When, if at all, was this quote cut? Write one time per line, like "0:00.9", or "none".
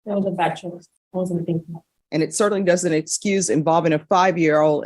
0:00.9
0:01.9